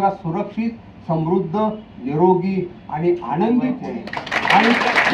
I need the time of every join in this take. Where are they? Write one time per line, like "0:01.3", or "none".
0:03.9

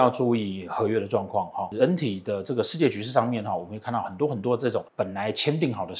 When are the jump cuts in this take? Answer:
0:01.7
0:04.9

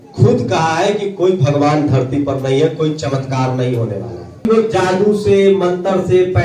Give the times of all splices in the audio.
0:04.5

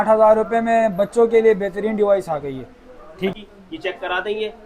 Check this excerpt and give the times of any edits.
0:03.3

